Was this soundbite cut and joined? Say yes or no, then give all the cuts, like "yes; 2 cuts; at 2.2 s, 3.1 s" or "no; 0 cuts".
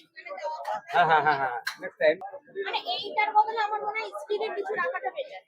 yes; 1 cut; at 2.4 s